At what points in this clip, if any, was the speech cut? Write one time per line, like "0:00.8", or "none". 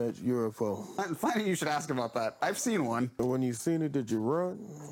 0:01.0
0:03.1